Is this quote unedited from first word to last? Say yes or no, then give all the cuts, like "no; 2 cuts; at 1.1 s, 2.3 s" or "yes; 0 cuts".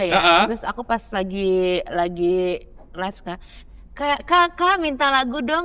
yes; 0 cuts